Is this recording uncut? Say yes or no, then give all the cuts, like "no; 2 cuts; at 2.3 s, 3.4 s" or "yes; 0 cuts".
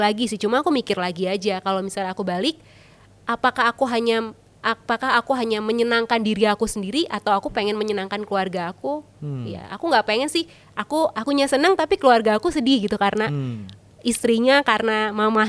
yes; 0 cuts